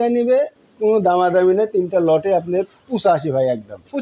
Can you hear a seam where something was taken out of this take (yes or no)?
no